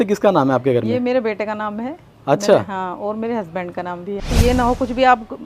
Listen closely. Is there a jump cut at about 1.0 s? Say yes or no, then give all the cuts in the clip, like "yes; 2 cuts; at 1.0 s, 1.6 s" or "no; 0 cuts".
no; 1 cut; at 4.3 s